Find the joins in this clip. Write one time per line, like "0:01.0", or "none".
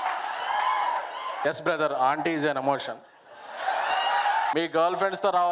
0:01.4
0:04.5